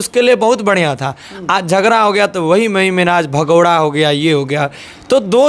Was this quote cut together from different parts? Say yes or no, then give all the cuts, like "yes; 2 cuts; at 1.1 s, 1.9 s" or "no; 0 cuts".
no; 0 cuts